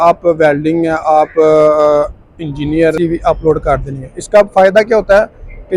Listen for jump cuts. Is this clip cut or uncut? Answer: cut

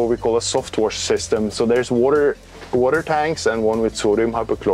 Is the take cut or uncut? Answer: uncut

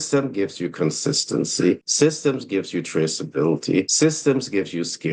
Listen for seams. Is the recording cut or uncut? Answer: cut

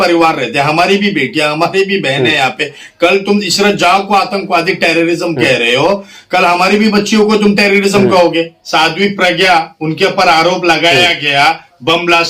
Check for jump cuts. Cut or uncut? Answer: cut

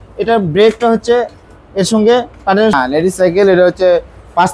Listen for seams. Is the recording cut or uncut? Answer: cut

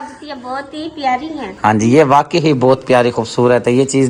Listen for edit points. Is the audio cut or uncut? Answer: uncut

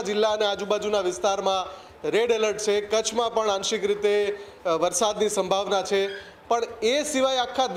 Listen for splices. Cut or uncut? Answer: uncut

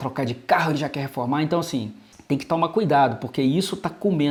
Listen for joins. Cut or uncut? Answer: uncut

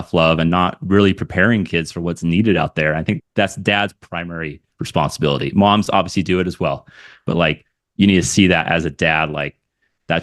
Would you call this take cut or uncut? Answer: cut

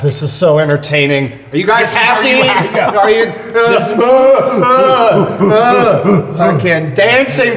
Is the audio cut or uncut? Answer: uncut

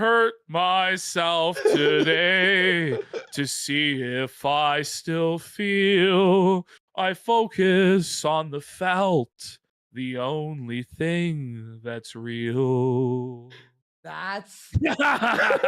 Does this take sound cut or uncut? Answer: cut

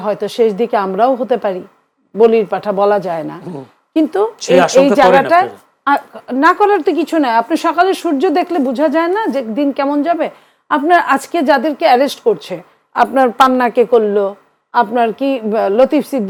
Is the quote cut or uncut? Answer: uncut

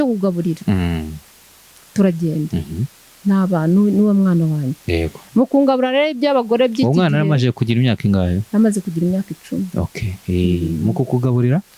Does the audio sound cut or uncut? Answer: uncut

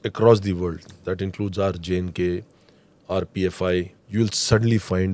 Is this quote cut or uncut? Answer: cut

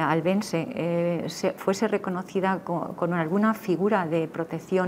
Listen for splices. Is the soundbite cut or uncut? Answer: uncut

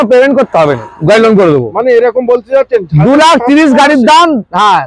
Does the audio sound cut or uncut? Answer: uncut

